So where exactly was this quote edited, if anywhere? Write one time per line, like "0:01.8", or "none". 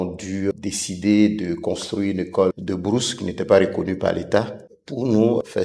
none